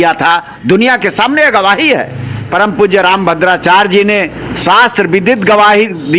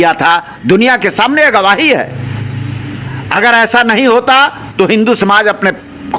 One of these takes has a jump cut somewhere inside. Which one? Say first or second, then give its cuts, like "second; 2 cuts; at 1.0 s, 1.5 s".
first; 1 cut; at 2.4 s